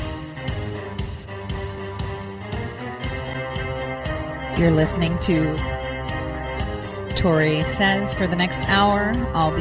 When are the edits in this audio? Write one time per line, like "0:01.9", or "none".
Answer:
none